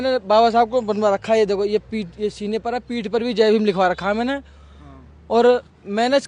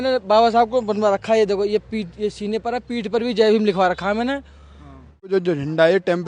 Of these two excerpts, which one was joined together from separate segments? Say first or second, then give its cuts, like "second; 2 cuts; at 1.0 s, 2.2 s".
second; 1 cut; at 5.3 s